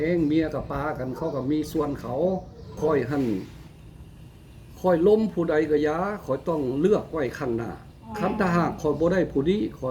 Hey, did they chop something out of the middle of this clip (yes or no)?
yes